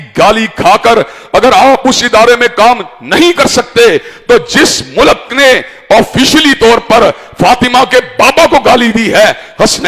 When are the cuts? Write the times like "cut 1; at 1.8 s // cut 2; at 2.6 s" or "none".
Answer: none